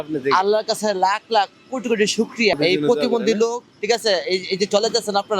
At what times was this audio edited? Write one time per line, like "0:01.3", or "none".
0:02.5